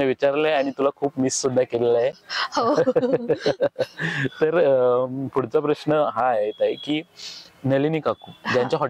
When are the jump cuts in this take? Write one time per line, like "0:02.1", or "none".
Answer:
none